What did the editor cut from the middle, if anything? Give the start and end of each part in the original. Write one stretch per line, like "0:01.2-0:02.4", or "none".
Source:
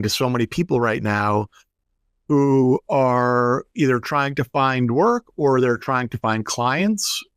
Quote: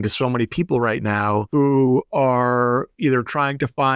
0:01.5-0:02.2